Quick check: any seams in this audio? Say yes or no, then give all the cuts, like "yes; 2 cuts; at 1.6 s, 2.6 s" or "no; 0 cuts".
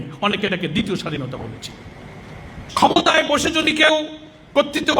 yes; 1 cut; at 2.7 s